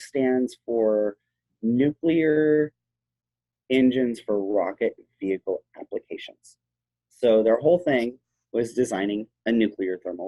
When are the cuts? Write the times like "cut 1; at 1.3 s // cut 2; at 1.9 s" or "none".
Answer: none